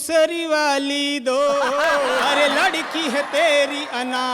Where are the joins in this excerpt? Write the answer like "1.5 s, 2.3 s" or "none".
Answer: 2.3 s